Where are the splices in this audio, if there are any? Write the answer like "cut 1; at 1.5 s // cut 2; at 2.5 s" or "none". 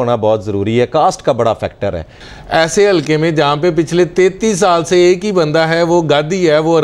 cut 1; at 2.2 s